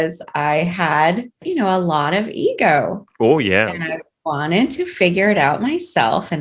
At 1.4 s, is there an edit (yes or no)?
yes